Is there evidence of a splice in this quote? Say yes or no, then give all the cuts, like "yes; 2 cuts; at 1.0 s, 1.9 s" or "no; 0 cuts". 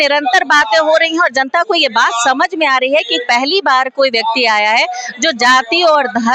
no; 0 cuts